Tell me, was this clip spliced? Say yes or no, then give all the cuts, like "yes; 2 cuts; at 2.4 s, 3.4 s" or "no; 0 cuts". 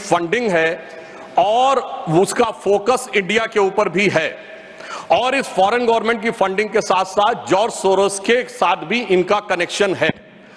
no; 0 cuts